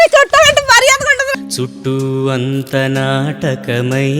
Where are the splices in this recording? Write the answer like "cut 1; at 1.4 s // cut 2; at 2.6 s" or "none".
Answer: cut 1; at 1.2 s